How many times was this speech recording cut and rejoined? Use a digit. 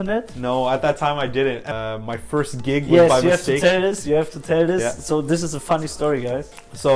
1